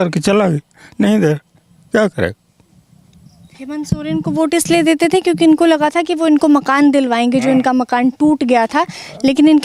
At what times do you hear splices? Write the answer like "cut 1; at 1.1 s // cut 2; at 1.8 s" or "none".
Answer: none